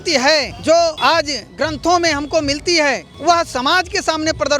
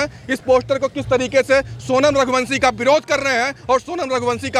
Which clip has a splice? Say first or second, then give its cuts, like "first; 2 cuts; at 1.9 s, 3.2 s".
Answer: first; 1 cut; at 1.0 s